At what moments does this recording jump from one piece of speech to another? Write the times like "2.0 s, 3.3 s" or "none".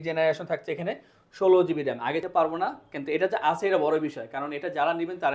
2.2 s